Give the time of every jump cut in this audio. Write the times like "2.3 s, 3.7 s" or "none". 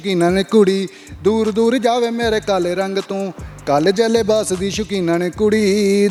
none